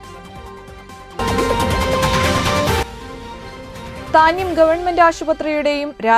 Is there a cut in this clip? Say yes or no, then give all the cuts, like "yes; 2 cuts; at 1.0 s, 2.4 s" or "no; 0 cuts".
yes; 1 cut; at 1.2 s